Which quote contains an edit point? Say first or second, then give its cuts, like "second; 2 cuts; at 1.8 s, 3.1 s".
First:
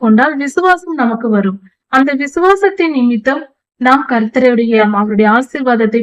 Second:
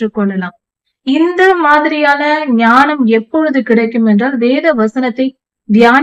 first; 1 cut; at 4.8 s